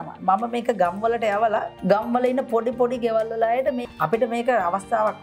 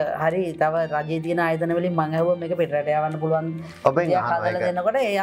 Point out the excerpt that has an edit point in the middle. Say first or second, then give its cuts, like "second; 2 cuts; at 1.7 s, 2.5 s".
first; 2 cuts; at 1.7 s, 3.8 s